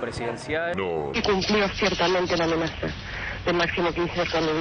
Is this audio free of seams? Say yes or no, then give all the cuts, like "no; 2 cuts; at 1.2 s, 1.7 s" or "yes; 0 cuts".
yes; 0 cuts